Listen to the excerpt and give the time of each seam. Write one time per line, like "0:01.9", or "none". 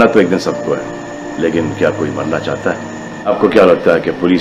0:03.3